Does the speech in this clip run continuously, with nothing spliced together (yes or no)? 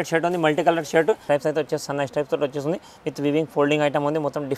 no